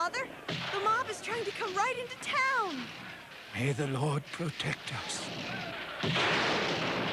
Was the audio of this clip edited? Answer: no; 0 cuts

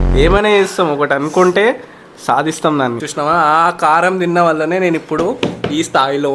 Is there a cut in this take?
yes; 1 cut; at 3.0 s

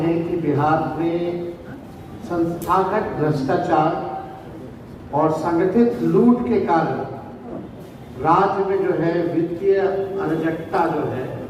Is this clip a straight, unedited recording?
yes; 0 cuts

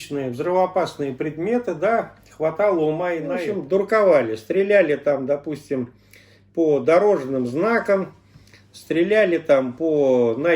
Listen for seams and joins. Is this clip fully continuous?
no; 1 cut; at 3.3 s

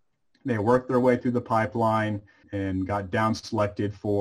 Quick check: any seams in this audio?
yes; 1 cut; at 2.4 s

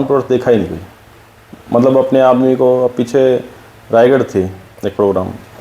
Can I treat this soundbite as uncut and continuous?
yes; 0 cuts

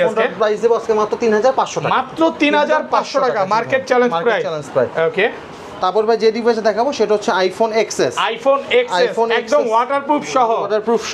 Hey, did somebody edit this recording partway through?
no; 0 cuts

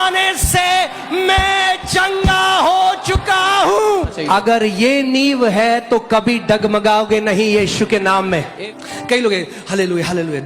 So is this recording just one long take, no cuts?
no; 2 cuts; at 4.2 s, 8.5 s

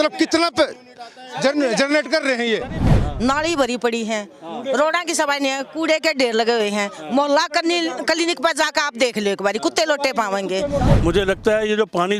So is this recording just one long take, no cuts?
no; 2 cuts; at 2.9 s, 11.0 s

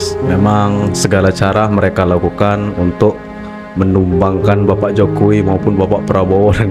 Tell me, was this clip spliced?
no; 0 cuts

